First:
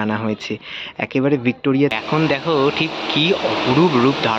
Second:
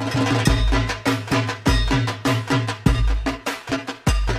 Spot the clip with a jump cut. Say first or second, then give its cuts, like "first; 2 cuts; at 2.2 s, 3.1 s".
first; 1 cut; at 1.9 s